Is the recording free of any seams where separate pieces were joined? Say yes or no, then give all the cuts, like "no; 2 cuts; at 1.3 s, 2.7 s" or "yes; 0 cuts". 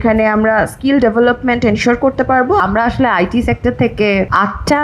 no; 1 cut; at 2.6 s